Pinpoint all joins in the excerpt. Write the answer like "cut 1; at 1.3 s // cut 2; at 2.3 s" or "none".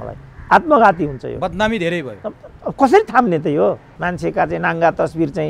cut 1; at 3.9 s